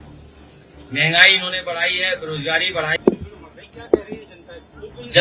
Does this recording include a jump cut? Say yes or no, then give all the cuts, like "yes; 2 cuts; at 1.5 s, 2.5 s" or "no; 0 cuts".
yes; 1 cut; at 2.9 s